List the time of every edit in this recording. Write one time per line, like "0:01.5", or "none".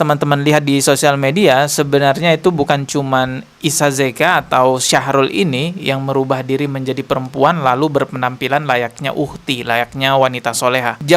none

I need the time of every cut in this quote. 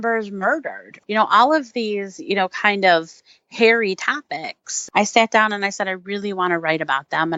0:00.9
0:04.8

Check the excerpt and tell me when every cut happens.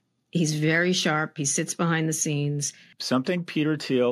0:02.9

